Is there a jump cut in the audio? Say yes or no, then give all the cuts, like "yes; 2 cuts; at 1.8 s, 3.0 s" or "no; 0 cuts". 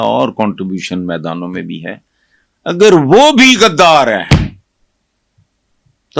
no; 0 cuts